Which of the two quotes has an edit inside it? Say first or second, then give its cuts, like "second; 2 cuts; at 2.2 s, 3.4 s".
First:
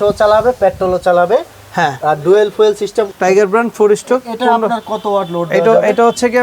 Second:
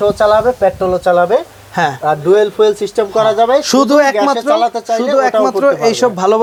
first; 1 cut; at 3.1 s